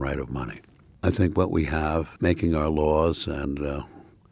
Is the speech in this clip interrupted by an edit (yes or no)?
yes